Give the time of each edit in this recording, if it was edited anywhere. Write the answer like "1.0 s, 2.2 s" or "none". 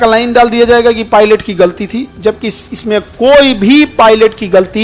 none